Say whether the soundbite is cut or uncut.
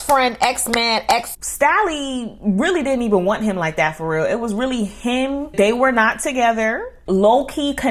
cut